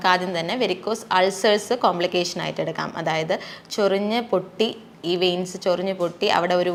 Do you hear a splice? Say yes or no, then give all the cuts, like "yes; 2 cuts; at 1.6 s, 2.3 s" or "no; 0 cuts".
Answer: no; 0 cuts